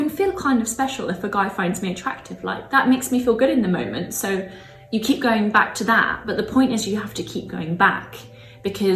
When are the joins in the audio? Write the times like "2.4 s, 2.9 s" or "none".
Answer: none